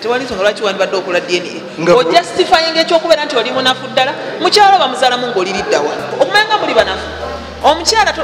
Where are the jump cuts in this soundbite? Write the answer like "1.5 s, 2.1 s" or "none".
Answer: 6.1 s